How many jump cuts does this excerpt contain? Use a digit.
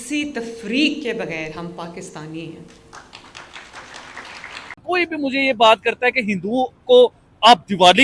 1